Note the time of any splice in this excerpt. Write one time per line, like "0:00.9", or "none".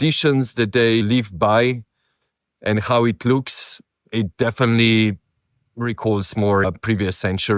0:01.0
0:06.6